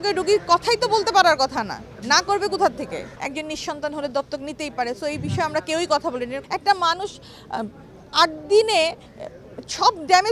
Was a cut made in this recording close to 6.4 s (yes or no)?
yes